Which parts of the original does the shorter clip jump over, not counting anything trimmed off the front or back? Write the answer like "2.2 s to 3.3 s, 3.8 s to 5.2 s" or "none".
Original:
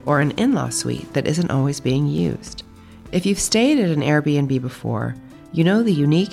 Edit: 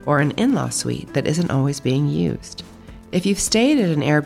none